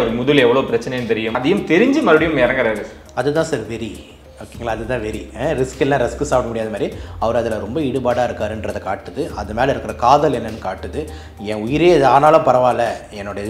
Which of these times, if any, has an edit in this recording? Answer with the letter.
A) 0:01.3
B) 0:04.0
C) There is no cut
A